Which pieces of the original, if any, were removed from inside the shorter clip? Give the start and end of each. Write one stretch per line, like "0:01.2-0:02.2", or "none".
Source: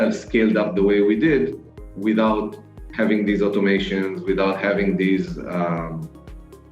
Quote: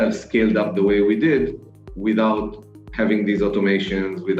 none